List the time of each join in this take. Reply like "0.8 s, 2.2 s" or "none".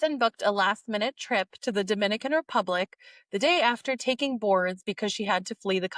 none